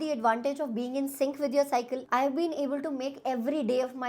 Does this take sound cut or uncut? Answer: cut